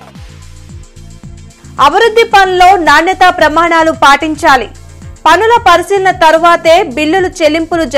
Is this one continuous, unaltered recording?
yes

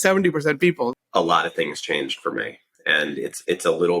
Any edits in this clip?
yes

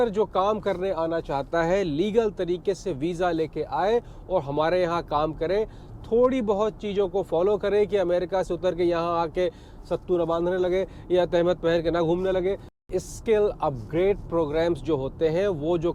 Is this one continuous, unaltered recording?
no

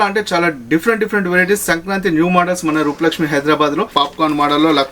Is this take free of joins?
no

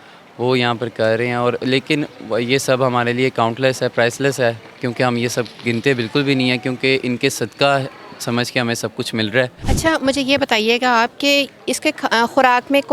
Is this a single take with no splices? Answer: no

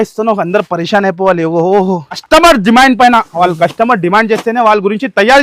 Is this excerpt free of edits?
no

